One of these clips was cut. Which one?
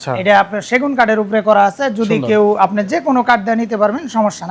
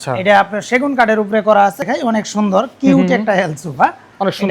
second; 1 cut; at 1.8 s

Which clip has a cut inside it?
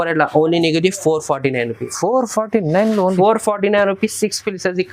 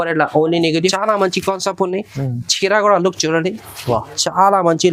second; 1 cut; at 0.9 s

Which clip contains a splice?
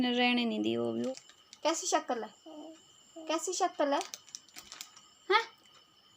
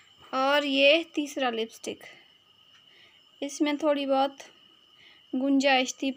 first; 1 cut; at 1.0 s

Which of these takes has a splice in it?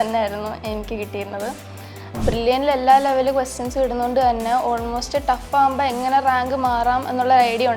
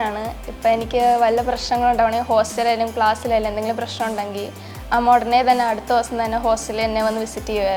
first; 1 cut; at 2.1 s

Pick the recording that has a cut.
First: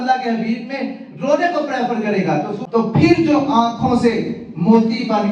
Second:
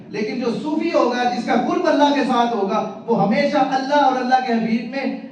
first; 1 cut; at 2.6 s

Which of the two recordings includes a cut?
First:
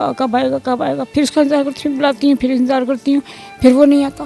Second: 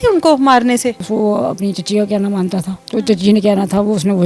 second; 2 cuts; at 1.1 s, 2.8 s

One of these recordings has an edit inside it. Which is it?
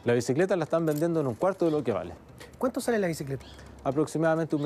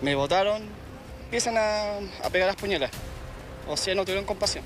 second; 1 cut; at 1.2 s

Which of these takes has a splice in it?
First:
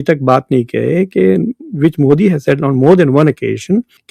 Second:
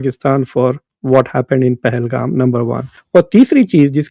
second; 1 cut; at 2.9 s

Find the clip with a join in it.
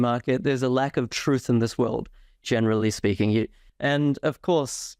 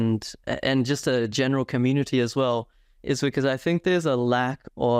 first; 1 cut; at 3.6 s

